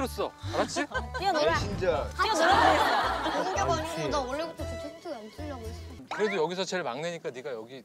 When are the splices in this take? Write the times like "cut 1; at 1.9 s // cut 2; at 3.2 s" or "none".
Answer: cut 1; at 6.0 s

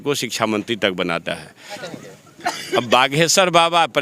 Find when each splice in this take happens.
cut 1; at 1.8 s

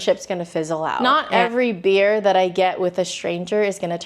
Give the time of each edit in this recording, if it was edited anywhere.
cut 1; at 1.0 s

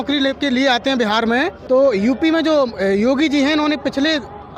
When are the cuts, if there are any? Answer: cut 1; at 1.6 s

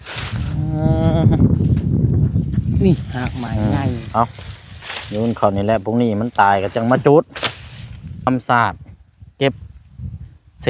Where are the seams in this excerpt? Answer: cut 1; at 8.3 s

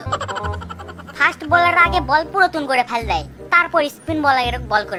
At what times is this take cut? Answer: none

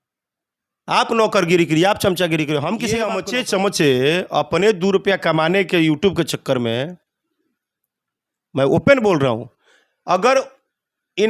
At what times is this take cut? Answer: cut 1; at 3.1 s

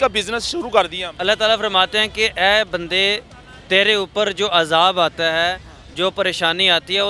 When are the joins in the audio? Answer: cut 1; at 1.1 s

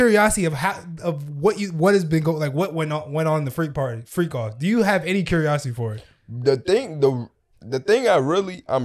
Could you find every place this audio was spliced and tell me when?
none

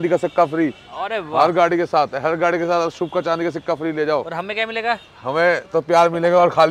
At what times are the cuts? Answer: none

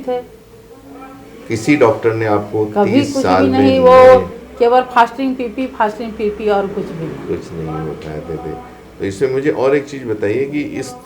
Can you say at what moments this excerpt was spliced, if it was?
none

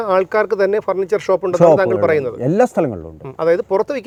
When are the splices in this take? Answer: none

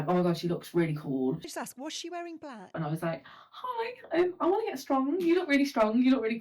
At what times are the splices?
cut 1; at 1.5 s // cut 2; at 2.8 s

